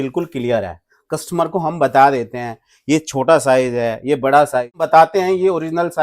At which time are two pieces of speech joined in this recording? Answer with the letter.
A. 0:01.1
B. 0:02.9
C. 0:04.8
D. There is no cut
C